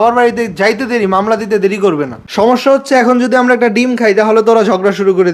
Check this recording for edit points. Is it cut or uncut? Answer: cut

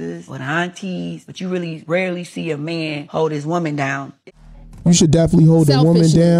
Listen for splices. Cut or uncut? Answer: cut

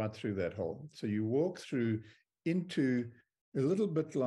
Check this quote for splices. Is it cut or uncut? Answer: uncut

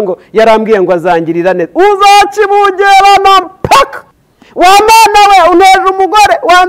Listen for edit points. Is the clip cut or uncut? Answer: cut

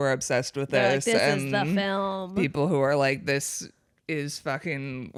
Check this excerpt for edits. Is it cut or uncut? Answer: uncut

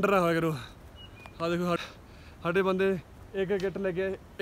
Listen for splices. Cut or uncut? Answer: cut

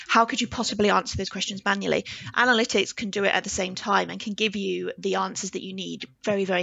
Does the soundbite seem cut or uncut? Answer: uncut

